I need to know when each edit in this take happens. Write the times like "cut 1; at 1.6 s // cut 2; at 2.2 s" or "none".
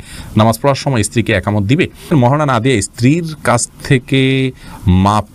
cut 1; at 2.1 s